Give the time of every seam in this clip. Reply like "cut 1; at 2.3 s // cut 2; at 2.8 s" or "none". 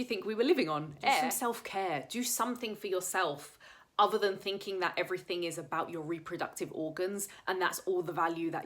cut 1; at 1.3 s